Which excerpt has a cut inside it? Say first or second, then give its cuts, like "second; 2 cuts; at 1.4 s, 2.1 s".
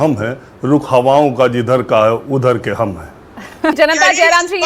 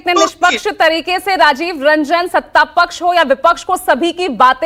first; 1 cut; at 3.8 s